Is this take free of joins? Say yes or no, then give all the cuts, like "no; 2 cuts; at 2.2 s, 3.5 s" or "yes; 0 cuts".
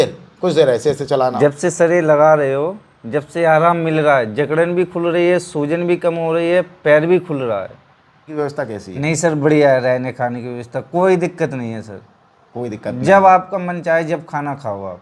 no; 2 cuts; at 1.2 s, 8.3 s